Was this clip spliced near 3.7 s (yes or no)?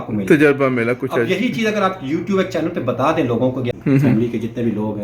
yes